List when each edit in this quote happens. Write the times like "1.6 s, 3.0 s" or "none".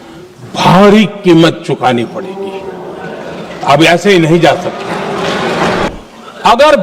5.9 s